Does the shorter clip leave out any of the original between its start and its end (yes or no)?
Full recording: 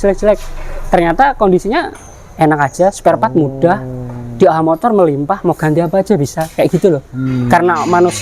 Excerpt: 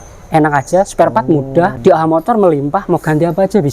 yes